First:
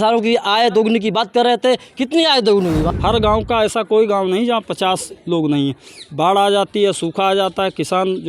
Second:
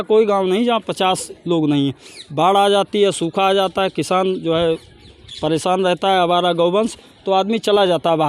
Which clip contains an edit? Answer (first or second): first